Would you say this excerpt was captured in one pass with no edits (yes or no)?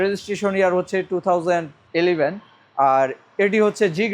yes